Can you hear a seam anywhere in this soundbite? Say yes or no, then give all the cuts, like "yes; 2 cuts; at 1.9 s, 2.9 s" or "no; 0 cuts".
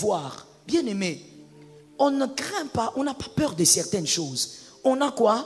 no; 0 cuts